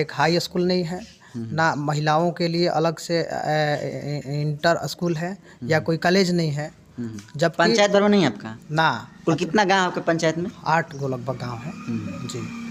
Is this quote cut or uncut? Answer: uncut